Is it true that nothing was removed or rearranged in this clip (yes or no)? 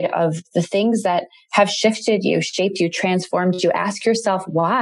yes